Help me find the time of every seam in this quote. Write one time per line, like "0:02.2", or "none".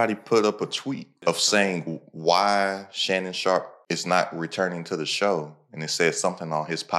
0:01.1
0:03.8